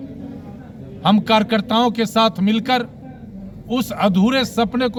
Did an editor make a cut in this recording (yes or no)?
no